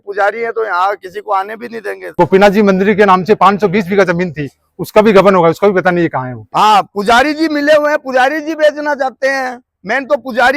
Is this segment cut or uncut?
cut